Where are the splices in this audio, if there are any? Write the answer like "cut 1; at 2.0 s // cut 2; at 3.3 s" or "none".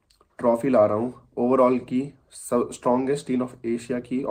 none